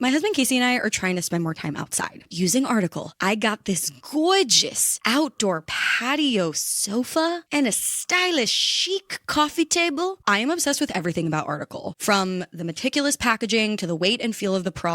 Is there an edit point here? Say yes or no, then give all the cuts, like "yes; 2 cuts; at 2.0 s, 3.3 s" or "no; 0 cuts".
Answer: yes; 2 cuts; at 2.3 s, 10.2 s